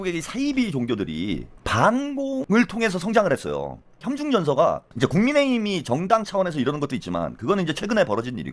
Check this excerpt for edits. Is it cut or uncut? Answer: cut